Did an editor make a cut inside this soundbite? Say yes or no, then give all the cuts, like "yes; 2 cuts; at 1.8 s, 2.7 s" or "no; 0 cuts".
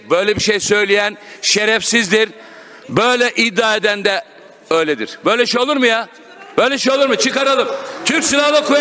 no; 0 cuts